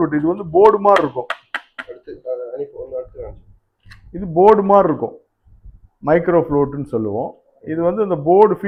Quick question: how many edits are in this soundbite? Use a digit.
0